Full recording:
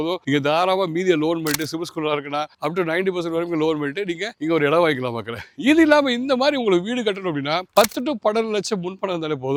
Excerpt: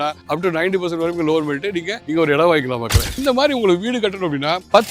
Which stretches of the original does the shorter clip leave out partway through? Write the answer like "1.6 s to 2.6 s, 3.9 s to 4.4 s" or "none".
5.5 s to 6.2 s